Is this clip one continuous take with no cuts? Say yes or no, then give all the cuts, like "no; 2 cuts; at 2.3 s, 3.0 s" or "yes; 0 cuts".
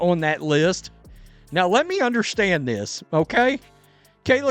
yes; 0 cuts